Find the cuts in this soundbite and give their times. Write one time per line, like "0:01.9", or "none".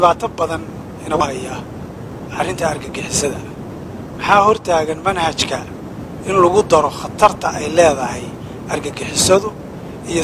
0:01.2